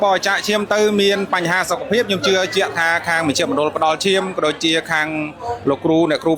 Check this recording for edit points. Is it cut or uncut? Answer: uncut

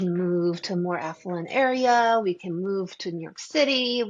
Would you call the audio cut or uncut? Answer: uncut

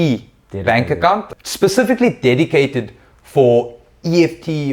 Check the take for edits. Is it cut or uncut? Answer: cut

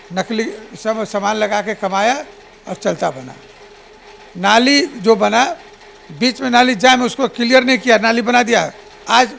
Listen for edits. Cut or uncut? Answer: uncut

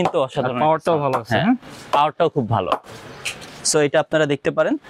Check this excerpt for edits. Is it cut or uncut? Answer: uncut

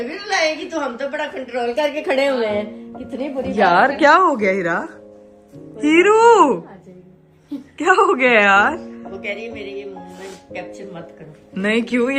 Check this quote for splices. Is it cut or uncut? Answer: uncut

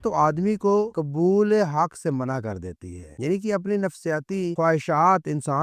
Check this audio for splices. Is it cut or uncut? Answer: uncut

